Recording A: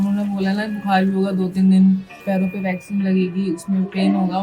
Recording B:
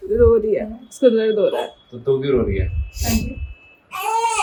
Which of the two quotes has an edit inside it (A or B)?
A